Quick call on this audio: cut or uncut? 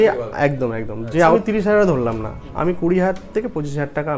cut